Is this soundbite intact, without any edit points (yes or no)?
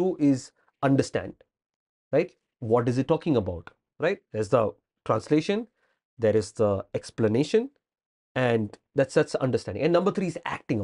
yes